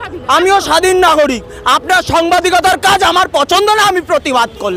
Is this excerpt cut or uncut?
uncut